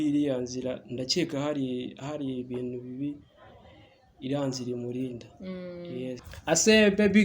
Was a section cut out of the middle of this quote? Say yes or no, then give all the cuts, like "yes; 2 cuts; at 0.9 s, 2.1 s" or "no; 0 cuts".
yes; 1 cut; at 6.3 s